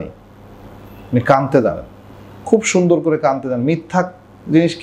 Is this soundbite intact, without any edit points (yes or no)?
yes